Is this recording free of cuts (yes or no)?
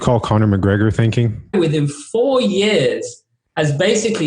no